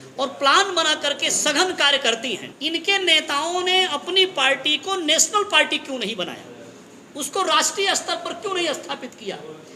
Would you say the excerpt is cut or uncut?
cut